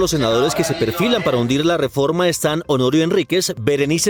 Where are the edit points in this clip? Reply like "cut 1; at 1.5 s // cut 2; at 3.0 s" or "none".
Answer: none